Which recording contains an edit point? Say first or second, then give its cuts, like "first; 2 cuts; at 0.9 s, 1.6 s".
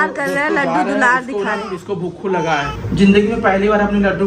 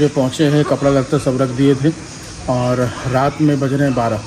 first; 1 cut; at 2.8 s